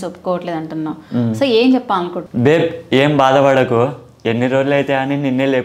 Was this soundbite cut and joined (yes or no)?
yes